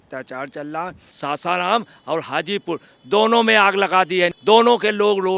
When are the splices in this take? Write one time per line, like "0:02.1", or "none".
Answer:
0:01.0